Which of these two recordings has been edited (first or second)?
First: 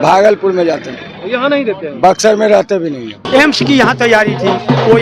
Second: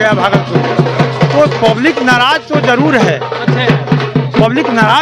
first